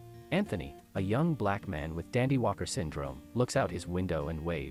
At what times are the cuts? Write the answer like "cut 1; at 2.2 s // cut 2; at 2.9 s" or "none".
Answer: none